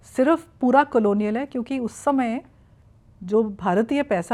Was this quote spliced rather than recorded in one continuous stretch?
no; 0 cuts

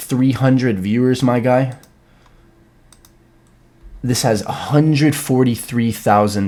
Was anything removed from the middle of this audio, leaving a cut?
no; 0 cuts

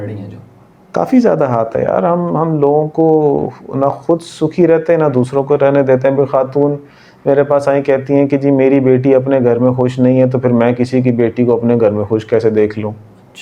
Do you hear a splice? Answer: no; 0 cuts

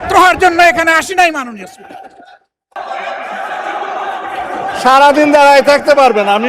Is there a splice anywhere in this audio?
yes; 1 cut; at 2.7 s

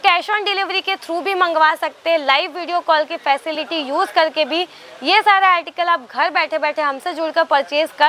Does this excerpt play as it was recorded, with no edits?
yes; 0 cuts

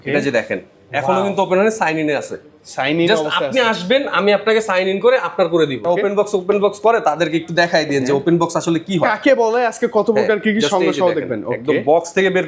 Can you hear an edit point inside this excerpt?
yes; 1 cut; at 5.8 s

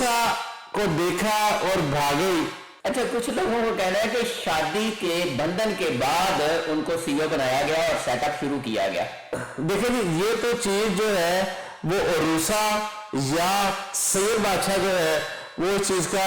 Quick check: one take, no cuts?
yes; 0 cuts

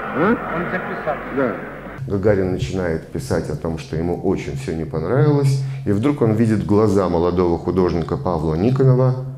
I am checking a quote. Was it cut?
yes; 1 cut; at 1.9 s

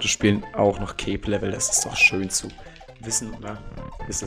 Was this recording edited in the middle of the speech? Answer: no; 0 cuts

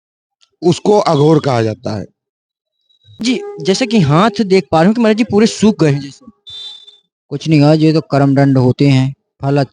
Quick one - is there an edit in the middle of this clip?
yes; 1 cut; at 3.2 s

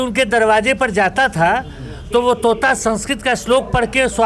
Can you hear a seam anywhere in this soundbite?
no; 0 cuts

